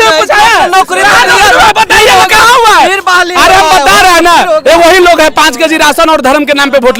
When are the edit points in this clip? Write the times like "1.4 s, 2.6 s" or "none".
none